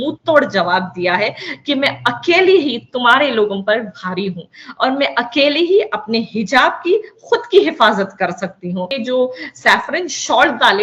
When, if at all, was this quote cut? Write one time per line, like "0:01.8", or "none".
0:08.9